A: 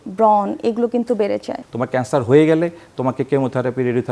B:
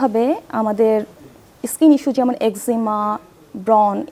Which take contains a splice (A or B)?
A